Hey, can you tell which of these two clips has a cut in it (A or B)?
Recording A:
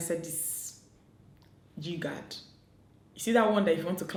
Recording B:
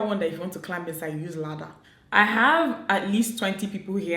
B